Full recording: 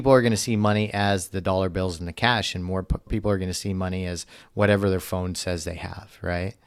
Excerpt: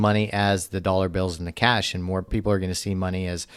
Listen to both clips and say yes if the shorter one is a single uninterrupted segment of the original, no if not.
no